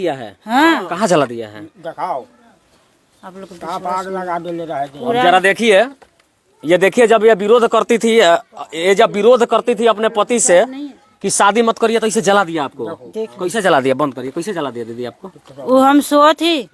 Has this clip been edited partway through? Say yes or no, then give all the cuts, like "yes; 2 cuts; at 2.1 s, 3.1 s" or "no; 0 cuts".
no; 0 cuts